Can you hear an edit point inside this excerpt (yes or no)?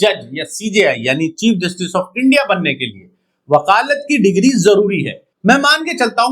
yes